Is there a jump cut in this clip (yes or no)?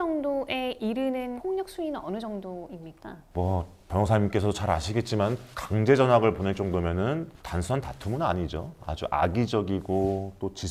no